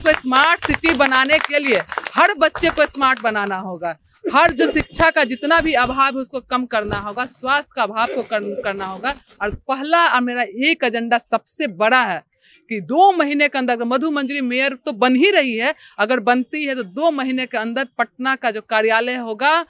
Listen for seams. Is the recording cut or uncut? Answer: uncut